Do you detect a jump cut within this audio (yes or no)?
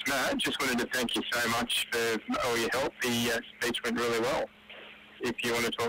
no